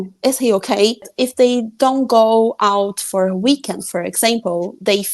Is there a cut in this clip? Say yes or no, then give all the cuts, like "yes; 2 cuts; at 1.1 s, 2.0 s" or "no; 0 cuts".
yes; 1 cut; at 1.1 s